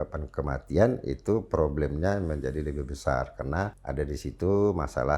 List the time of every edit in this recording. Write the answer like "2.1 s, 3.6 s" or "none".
3.8 s